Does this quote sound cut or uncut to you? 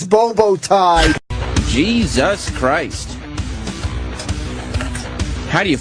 cut